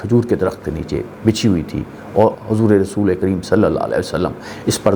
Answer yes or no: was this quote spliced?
no